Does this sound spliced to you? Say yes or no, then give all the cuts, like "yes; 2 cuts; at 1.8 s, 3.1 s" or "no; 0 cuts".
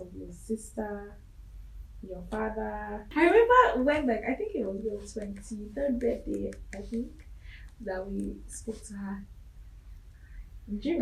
yes; 1 cut; at 3.0 s